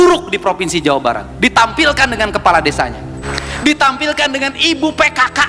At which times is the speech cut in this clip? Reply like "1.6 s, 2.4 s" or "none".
3.2 s